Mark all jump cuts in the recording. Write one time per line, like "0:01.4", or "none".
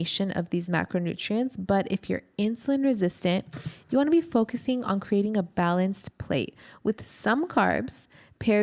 none